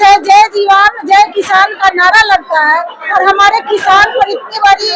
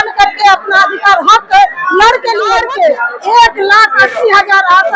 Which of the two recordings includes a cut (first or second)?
second